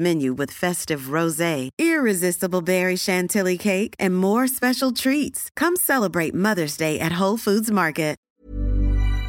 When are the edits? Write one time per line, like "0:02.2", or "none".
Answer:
0:08.3

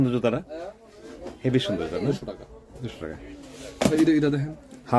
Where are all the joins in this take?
none

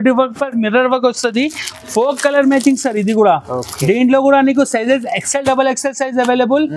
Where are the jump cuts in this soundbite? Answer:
none

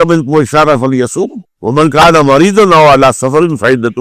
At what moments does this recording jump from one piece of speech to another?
none

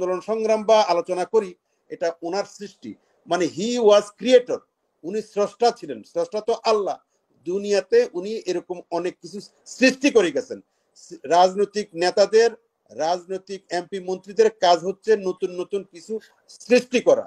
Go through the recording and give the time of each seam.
none

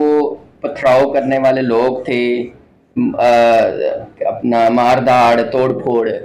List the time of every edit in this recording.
none

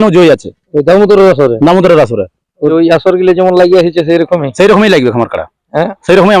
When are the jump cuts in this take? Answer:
0:02.7

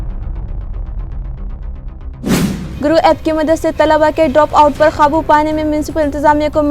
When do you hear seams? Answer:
0:02.7

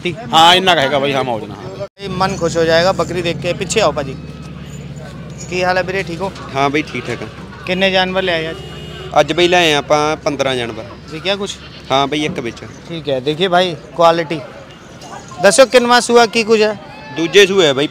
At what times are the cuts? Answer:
0:02.1

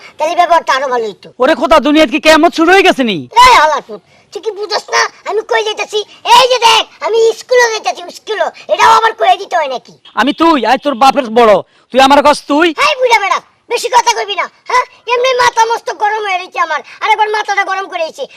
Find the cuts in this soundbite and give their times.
0:01.2
0:03.2
0:10.0

